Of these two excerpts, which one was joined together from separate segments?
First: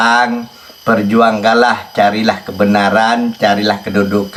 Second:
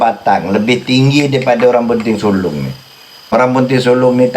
second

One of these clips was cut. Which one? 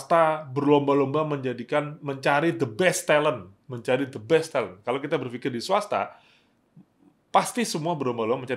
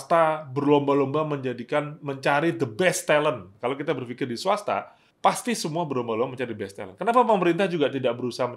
second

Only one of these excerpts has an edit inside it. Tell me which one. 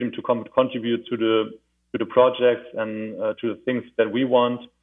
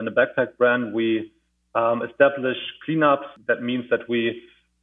second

